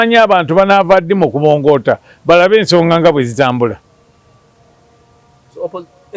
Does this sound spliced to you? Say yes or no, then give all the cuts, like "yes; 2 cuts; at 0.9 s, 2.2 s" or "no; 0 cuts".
no; 0 cuts